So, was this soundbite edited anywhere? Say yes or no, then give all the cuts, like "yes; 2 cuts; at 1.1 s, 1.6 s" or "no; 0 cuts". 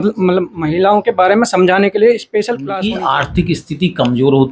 yes; 1 cut; at 2.6 s